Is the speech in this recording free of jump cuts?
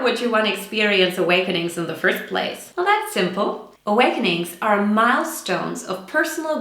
no; 2 cuts; at 2.6 s, 3.7 s

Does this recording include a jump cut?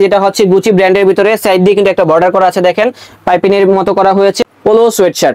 yes; 1 cut; at 4.4 s

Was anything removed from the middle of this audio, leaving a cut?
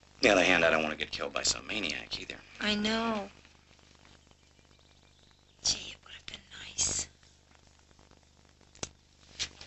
yes; 1 cut; at 3.7 s

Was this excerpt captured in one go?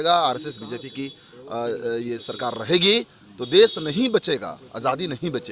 yes; 0 cuts

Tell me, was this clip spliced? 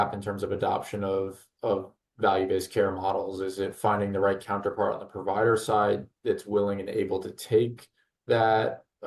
no; 0 cuts

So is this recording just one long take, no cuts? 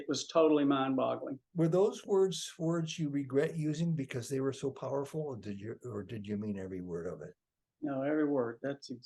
no; 1 cut; at 1.4 s

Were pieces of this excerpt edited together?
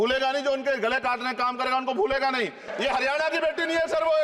yes; 1 cut; at 2.7 s

